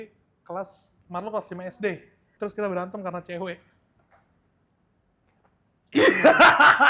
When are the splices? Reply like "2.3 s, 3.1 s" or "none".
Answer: 2.3 s, 4.0 s

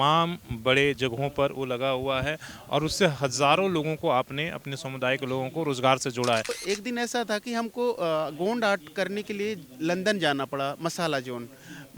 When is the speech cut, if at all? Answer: 6.6 s

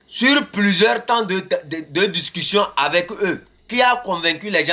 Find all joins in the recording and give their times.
3.5 s

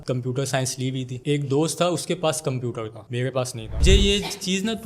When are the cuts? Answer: 1.2 s, 3.8 s

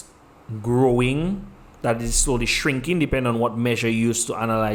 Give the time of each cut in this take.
none

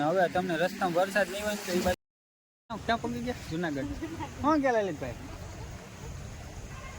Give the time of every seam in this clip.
2.0 s

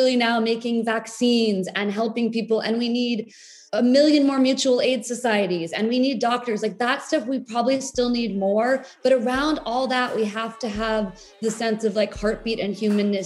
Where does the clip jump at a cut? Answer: 3.6 s

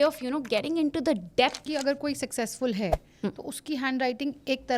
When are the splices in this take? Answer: 1.6 s

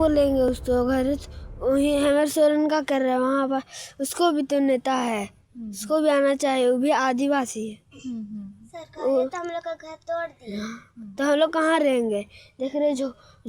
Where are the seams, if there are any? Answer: none

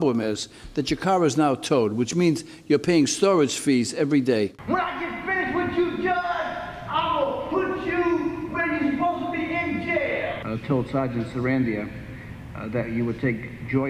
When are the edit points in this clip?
4.6 s, 10.4 s

